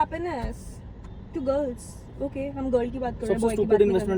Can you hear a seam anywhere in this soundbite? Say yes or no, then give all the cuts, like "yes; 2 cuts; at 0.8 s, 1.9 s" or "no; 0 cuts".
no; 0 cuts